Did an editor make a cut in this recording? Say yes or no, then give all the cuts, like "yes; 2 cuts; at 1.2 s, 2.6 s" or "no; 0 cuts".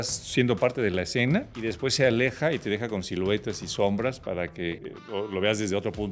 yes; 2 cuts; at 1.5 s, 4.7 s